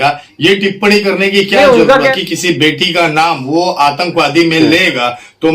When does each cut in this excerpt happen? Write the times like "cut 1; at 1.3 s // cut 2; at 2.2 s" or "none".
cut 1; at 2.2 s